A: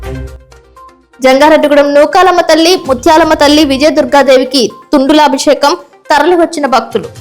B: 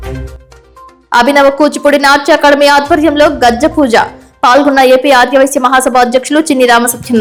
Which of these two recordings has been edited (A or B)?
A